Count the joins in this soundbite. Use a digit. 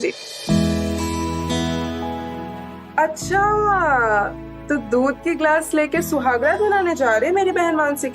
1